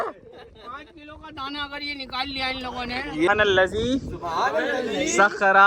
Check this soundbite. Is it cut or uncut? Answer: cut